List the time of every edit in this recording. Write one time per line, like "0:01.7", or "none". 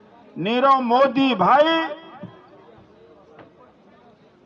none